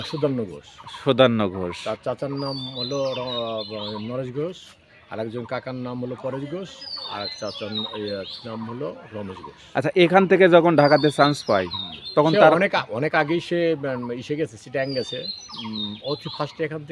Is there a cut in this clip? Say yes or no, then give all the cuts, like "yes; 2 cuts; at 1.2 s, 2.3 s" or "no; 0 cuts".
no; 0 cuts